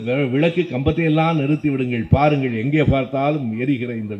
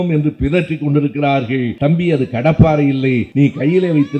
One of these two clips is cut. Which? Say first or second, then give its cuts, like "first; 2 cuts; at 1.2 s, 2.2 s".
second; 2 cuts; at 1.7 s, 3.3 s